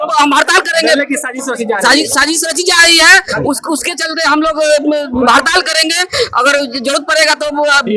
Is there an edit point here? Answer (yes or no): no